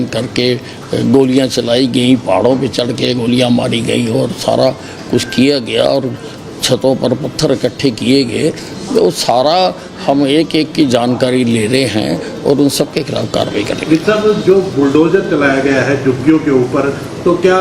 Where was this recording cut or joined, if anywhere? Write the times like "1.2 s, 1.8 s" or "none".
none